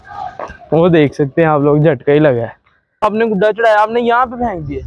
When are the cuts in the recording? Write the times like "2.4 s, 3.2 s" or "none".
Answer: 3.0 s

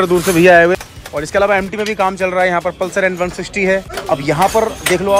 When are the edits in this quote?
0.8 s, 3.9 s

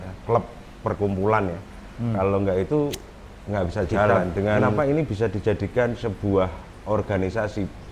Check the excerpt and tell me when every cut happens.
4.7 s

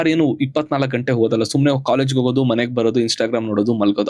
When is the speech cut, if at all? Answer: none

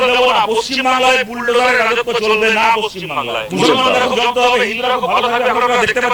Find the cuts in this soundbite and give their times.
3.0 s

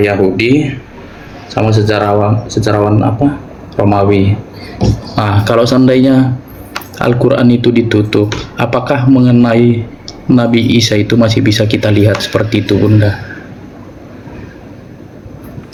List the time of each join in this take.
none

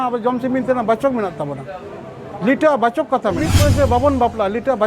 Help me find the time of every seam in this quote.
3.5 s

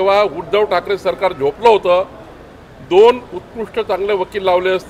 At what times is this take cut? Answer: none

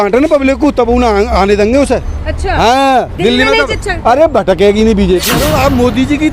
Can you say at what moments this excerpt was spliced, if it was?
5.2 s

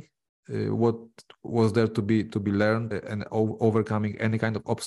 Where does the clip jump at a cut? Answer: 2.9 s

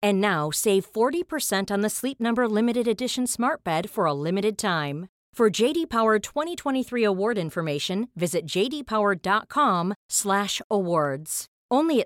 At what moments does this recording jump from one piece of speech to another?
none

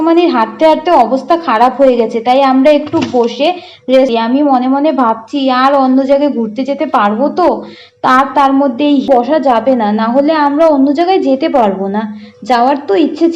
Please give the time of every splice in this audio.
4.1 s, 9.1 s

